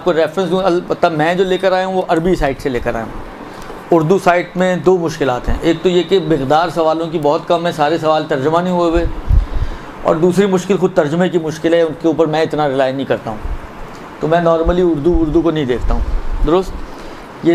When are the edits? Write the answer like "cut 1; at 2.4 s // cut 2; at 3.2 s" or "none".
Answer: cut 1; at 8.2 s